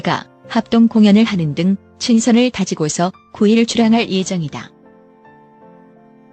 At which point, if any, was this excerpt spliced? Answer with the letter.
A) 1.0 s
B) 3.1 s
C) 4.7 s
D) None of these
C